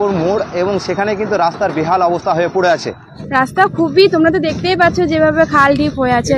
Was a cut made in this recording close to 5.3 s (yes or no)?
no